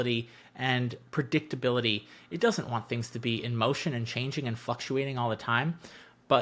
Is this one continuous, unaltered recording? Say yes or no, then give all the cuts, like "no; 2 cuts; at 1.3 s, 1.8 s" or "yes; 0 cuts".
yes; 0 cuts